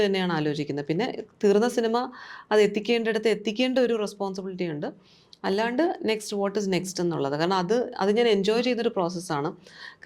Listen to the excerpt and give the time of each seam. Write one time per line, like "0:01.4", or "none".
none